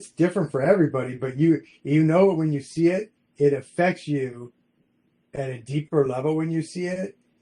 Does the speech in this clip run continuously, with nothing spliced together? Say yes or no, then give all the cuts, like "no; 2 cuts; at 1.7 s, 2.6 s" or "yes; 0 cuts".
yes; 0 cuts